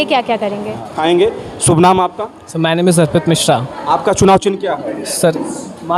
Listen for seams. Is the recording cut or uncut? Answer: cut